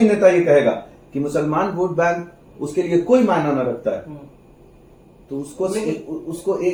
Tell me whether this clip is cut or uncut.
uncut